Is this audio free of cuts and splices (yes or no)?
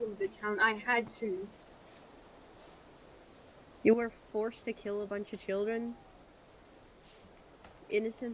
yes